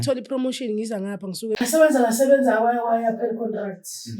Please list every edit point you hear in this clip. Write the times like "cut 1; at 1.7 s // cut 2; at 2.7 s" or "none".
cut 1; at 1.6 s